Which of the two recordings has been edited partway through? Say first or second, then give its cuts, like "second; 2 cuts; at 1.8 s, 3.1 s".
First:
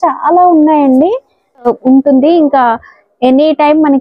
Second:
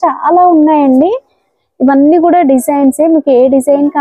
first; 1 cut; at 1.7 s